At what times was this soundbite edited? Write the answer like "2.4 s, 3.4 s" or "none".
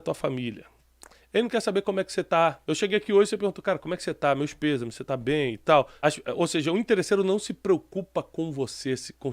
2.6 s, 5.9 s